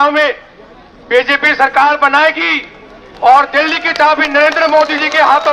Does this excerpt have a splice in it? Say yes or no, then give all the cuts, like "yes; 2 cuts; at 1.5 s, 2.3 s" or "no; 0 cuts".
no; 0 cuts